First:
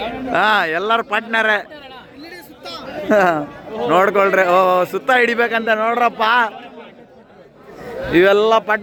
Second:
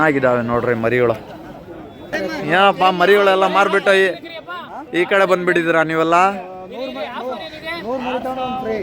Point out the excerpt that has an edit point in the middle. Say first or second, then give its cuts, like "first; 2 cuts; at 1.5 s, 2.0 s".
second; 1 cut; at 2.1 s